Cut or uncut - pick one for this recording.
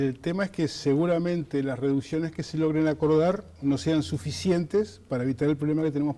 cut